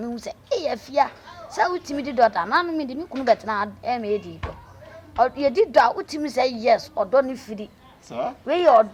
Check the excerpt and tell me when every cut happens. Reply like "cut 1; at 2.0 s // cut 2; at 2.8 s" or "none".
none